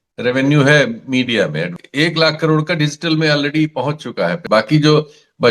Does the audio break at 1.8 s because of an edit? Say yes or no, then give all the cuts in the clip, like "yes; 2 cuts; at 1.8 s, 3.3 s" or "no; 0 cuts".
yes; 2 cuts; at 1.8 s, 4.4 s